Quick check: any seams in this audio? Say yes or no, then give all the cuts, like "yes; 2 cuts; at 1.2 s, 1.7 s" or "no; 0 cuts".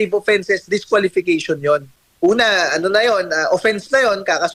yes; 1 cut; at 2.0 s